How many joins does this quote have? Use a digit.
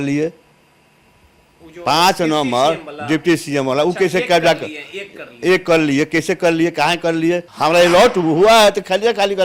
1